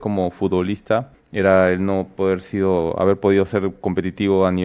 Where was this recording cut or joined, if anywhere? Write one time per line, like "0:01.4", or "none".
0:01.2

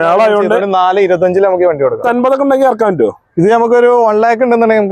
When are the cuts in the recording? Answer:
0:02.0

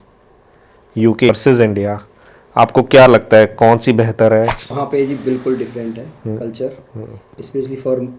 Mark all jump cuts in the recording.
0:01.3
0:04.6

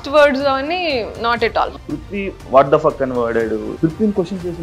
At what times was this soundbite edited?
0:01.7
0:03.7

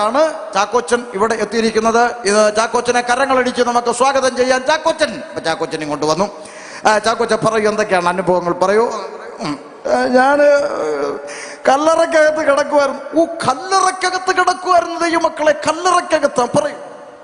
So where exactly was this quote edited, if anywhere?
none

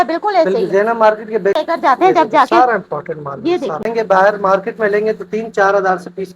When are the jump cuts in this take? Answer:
0:01.6
0:03.9

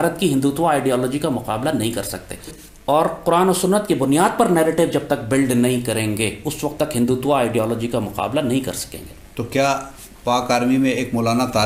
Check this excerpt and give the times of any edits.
none

